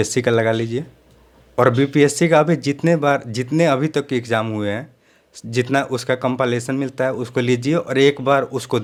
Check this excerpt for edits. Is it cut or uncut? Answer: uncut